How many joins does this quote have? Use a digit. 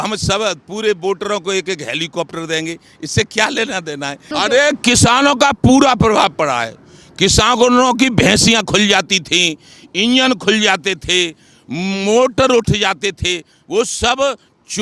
1